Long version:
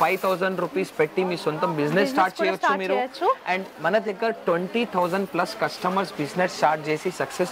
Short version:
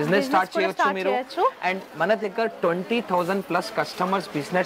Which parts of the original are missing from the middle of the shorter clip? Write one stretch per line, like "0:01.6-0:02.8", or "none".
none

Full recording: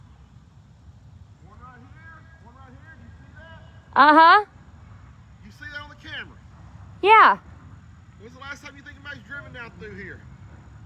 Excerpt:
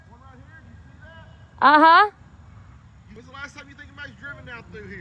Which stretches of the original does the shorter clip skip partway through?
0:05.5-0:08.2

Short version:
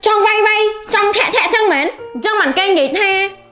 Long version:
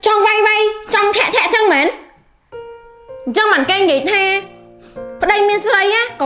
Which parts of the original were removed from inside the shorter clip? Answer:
0:02.1-0:03.2

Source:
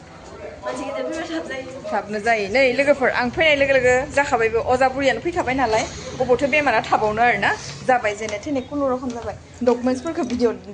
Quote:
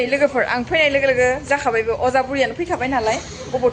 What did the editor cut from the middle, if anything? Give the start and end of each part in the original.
none

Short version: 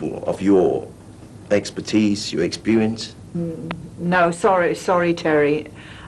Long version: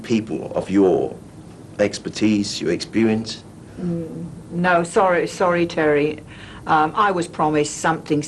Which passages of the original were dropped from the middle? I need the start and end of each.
0:03.4-0:03.7

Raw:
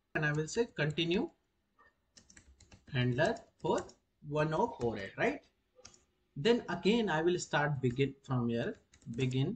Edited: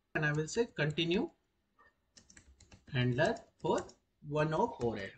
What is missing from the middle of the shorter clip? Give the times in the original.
none

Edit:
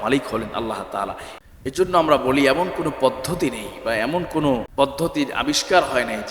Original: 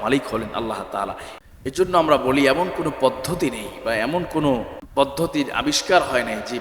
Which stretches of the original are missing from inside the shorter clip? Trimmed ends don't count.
0:04.7-0:04.9

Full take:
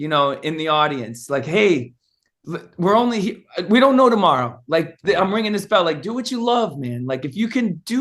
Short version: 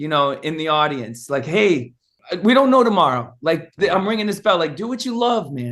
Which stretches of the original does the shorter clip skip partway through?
0:02.2-0:03.5

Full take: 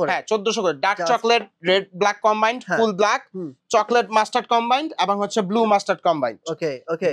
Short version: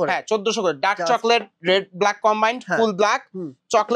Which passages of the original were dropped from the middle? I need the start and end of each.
none

